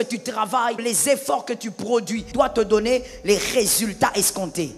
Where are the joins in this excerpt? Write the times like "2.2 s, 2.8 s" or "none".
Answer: 0.8 s, 2.3 s